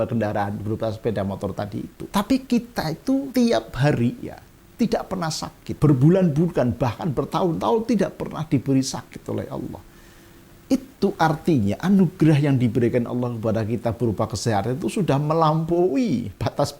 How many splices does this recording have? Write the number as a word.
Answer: three